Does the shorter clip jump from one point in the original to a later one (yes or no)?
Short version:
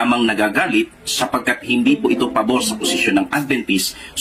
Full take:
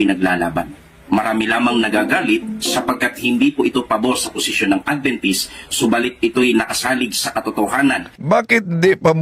no